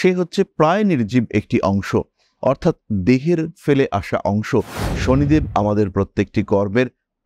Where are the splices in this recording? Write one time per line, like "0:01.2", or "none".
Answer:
0:04.8